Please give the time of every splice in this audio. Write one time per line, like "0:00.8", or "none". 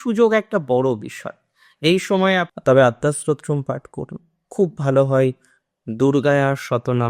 0:02.5